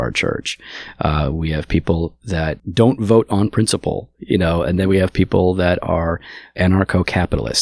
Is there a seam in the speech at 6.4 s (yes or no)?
yes